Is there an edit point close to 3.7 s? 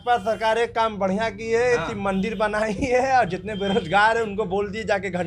no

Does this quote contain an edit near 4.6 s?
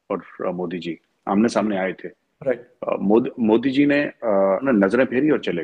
yes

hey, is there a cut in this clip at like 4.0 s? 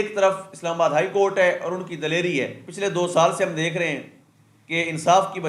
no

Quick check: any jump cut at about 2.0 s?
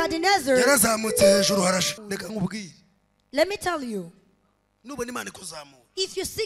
yes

